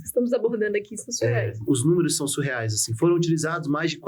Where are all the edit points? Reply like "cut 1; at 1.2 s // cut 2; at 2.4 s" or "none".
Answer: cut 1; at 1.6 s

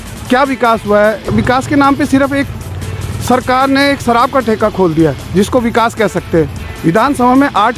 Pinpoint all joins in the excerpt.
cut 1; at 1.2 s // cut 2; at 6.6 s

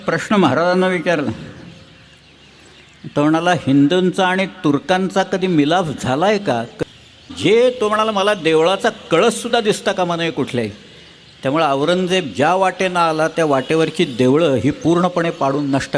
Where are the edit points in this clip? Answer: cut 1; at 7.2 s

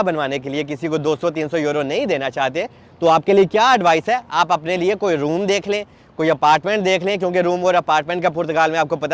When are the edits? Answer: none

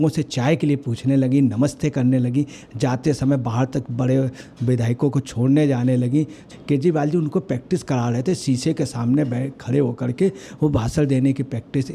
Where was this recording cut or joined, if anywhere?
cut 1; at 6.5 s

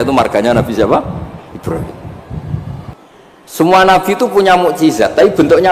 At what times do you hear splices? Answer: cut 1; at 2.9 s

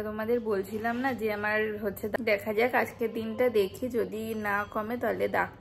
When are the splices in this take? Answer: cut 1; at 2.2 s

